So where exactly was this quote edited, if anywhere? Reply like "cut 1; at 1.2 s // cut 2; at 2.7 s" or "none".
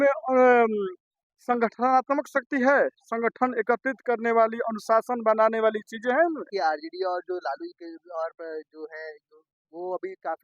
cut 1; at 6.5 s